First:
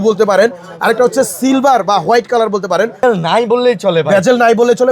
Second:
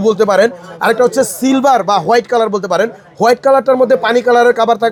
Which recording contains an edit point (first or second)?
first